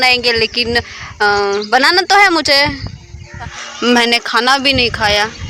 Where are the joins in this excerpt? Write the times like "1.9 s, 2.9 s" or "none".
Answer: 3.6 s